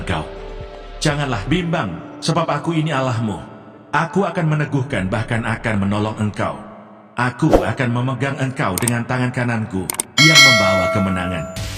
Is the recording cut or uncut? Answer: uncut